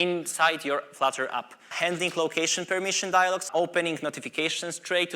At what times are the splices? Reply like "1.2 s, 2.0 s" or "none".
1.7 s, 3.5 s